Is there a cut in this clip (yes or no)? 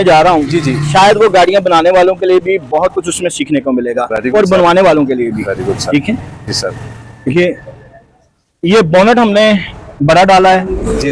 no